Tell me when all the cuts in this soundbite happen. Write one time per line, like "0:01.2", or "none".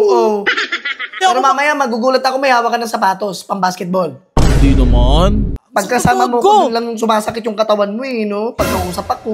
0:01.2
0:05.6